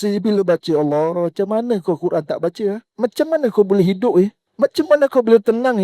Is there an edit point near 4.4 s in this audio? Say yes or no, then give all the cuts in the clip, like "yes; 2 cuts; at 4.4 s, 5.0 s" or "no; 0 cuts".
yes; 2 cuts; at 2.9 s, 4.4 s